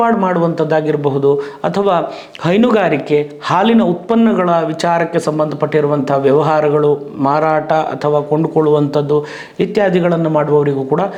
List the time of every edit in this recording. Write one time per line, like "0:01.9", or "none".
none